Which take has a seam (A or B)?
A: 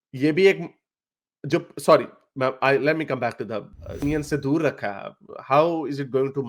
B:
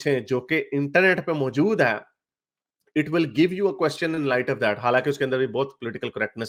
A